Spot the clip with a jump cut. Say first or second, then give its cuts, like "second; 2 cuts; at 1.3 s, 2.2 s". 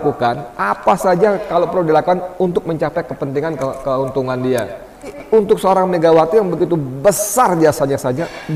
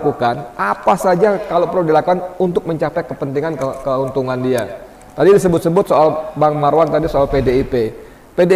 first; 1 cut; at 5.1 s